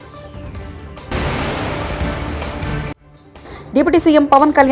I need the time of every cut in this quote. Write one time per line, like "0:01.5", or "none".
none

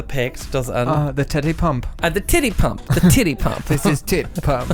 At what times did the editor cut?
none

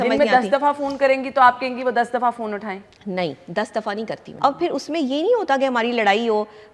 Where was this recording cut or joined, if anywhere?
0:04.3

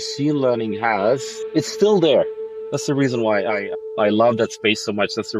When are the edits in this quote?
0:02.5

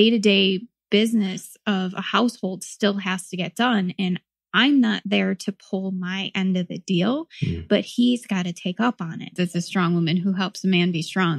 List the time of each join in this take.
0:09.3

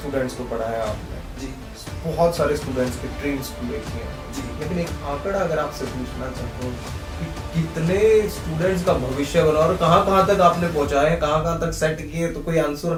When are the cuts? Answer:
none

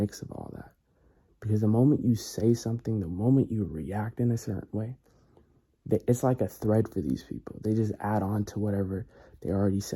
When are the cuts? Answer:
none

